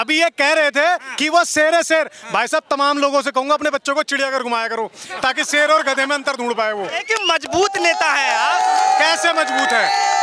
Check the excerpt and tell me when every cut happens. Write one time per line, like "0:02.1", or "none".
0:07.0